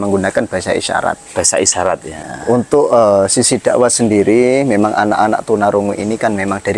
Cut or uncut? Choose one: cut